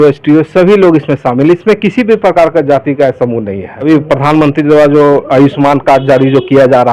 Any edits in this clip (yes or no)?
yes